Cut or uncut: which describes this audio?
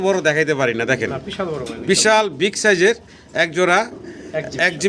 uncut